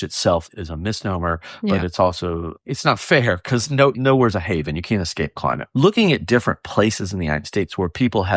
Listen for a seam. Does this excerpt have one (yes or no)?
yes